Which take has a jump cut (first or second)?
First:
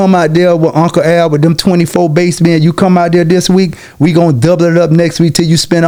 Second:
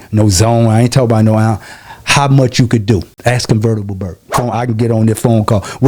second